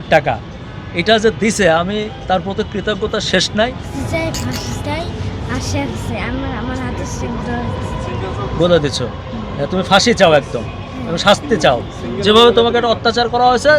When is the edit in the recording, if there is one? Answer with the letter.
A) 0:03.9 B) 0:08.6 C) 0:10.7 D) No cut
A